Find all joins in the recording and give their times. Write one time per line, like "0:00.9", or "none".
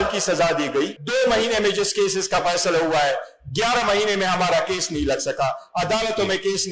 0:01.0

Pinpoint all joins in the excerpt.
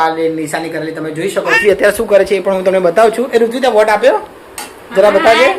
0:01.6

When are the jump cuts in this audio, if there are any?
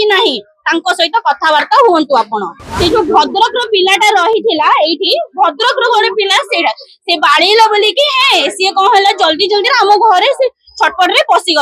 0:02.6

